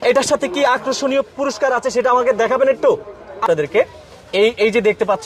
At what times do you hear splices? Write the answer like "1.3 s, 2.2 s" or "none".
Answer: 3.4 s